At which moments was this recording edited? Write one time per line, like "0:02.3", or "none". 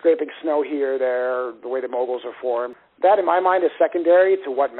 0:02.8

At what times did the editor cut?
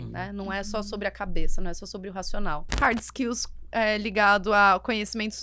0:02.6

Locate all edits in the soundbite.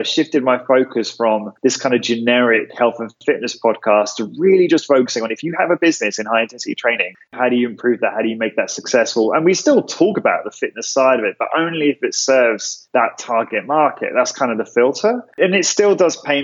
none

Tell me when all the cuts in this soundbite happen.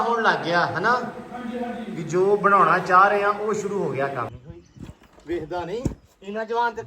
0:04.3

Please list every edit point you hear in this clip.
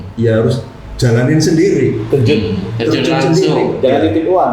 none

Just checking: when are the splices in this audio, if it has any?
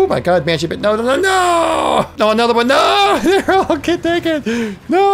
0:02.1

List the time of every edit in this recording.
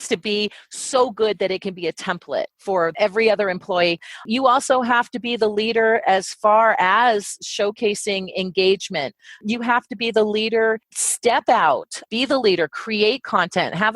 0:02.5
0:04.1

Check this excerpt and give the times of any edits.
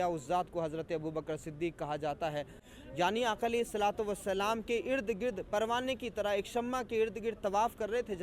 0:02.6

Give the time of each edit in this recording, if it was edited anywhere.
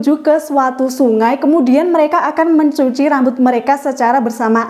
none

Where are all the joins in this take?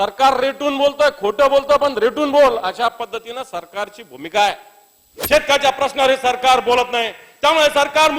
0:05.1

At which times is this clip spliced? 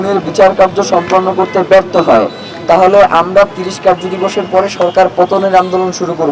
none

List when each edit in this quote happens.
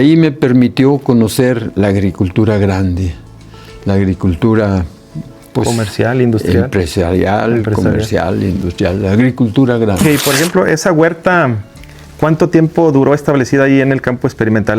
0:10.0

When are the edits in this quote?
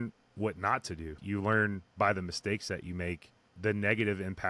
0:01.2
0:03.5

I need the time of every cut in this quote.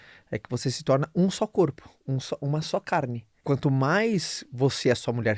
0:03.3

